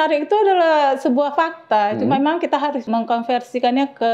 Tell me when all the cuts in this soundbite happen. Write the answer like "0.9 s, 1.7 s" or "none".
2.9 s

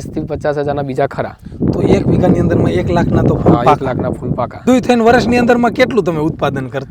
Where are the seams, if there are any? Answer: 4.6 s

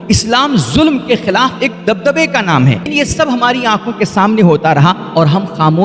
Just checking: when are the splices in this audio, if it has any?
2.9 s

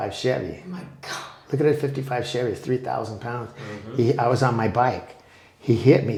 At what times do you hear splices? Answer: none

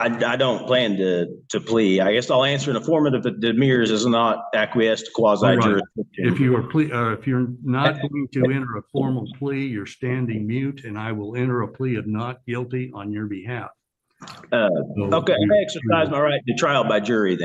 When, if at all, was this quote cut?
none

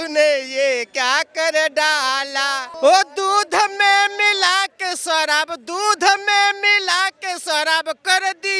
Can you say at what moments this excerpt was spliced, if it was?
2.6 s

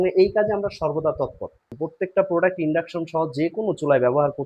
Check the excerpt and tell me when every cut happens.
1.8 s

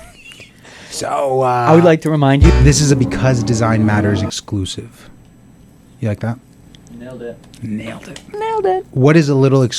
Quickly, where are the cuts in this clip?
2.5 s, 8.9 s

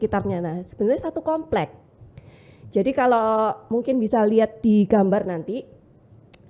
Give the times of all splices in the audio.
none

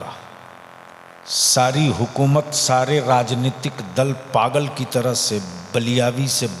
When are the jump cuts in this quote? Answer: 1.1 s

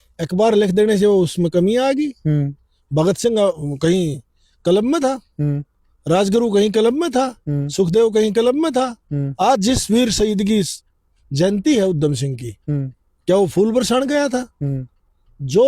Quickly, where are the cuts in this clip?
none

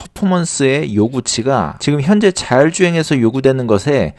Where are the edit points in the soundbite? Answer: 1.7 s

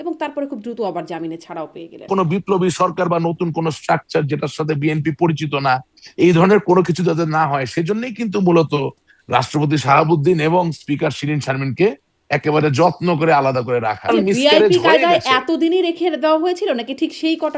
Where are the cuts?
2.1 s, 14.1 s

